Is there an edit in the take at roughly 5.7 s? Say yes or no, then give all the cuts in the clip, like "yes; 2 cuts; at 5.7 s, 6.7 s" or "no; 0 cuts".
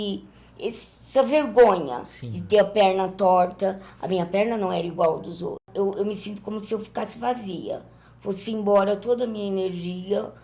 yes; 1 cut; at 5.7 s